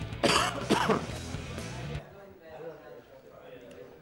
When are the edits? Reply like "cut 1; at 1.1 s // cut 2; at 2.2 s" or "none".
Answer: cut 1; at 3.0 s